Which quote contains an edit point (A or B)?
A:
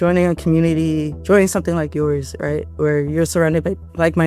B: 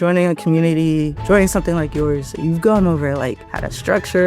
B